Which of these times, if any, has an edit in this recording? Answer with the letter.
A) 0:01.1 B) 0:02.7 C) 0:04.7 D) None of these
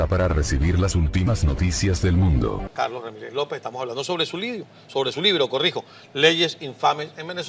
B